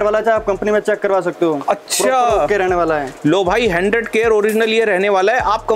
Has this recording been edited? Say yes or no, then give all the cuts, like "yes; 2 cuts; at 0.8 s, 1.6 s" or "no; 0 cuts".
no; 0 cuts